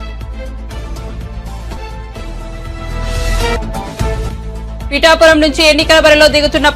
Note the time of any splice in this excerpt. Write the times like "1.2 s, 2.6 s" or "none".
1.0 s